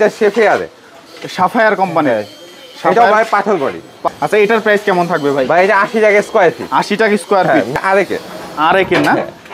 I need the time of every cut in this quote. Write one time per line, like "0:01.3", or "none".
0:04.0
0:07.8